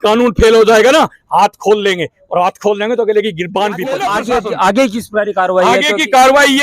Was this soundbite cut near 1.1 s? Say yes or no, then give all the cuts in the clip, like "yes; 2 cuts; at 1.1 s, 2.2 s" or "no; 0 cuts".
no; 1 cut; at 4.0 s